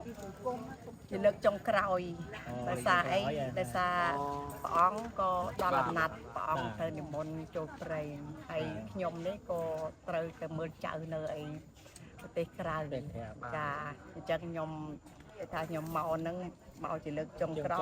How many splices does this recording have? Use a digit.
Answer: 0